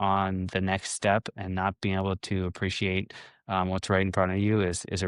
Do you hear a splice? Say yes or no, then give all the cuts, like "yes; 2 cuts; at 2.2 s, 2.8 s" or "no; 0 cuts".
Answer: no; 0 cuts